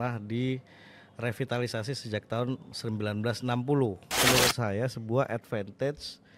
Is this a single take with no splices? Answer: no; 1 cut; at 4.1 s

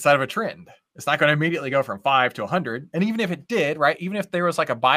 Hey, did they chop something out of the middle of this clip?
no; 0 cuts

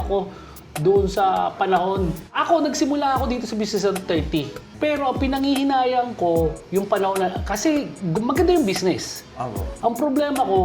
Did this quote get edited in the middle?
yes; 2 cuts; at 2.4 s, 4.6 s

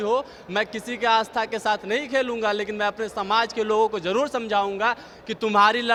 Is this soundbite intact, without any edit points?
yes; 0 cuts

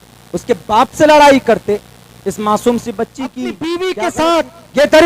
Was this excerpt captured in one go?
no; 1 cut; at 3.5 s

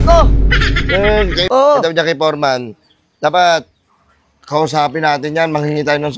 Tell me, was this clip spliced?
yes; 1 cut; at 1.4 s

